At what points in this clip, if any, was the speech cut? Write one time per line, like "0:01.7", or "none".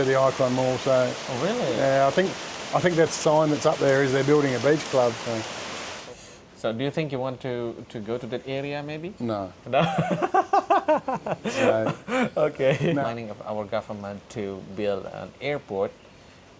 0:05.9
0:13.0